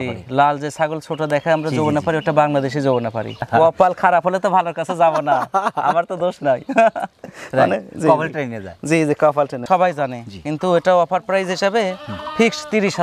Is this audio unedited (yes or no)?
no